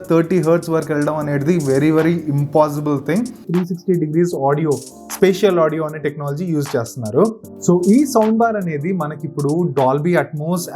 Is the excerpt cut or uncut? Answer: cut